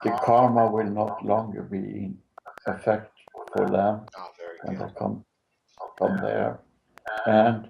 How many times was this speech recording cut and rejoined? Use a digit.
1